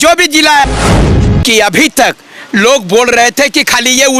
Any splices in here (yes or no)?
yes